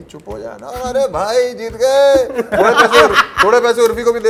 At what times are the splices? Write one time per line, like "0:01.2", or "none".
none